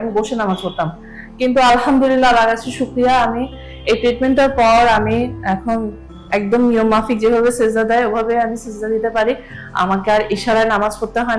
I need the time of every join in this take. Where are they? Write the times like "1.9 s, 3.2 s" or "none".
none